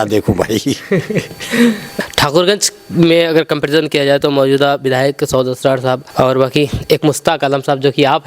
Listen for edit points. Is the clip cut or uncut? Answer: cut